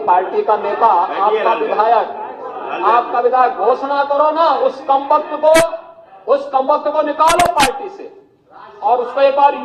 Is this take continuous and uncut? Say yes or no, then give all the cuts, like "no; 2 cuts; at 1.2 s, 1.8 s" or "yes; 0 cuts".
yes; 0 cuts